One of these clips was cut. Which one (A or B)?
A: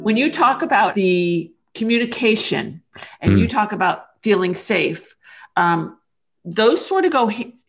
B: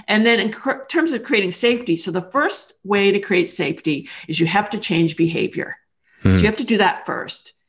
A